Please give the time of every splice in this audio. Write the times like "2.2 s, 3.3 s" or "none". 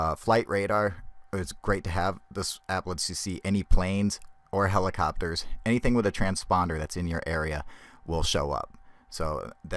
3.3 s